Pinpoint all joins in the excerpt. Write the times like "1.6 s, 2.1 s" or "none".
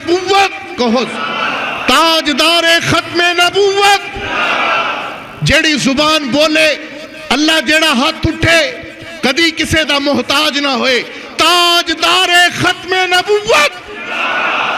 none